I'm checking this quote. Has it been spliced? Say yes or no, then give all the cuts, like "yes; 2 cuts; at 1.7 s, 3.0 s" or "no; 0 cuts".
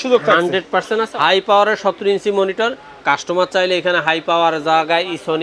yes; 1 cut; at 1.1 s